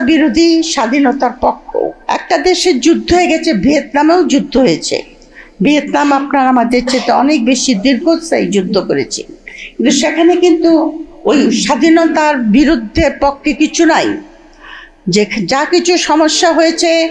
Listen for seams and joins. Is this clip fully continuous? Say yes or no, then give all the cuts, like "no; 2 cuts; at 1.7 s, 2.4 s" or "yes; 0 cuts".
no; 1 cut; at 2.0 s